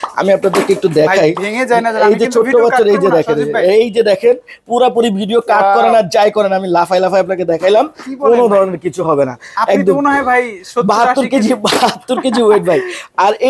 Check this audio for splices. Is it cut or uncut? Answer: uncut